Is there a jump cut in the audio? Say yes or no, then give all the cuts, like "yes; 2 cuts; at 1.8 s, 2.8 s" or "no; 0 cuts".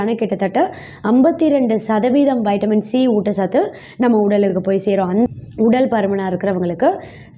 yes; 1 cut; at 5.3 s